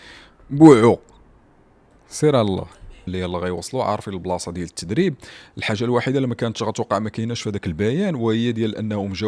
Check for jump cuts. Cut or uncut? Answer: cut